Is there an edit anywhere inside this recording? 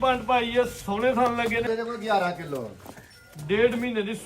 yes; 1 cut; at 1.7 s

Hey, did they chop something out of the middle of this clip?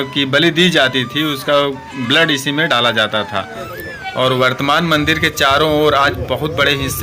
yes; 1 cut; at 3.7 s

